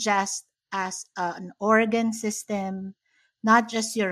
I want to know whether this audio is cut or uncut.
uncut